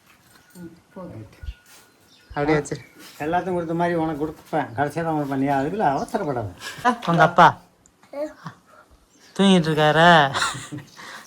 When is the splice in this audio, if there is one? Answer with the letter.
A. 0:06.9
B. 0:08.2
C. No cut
A